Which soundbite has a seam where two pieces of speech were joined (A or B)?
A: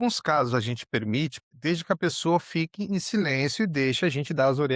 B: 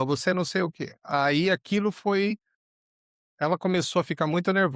A